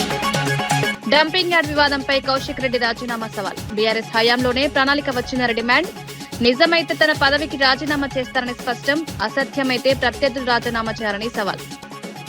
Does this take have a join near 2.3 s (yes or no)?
no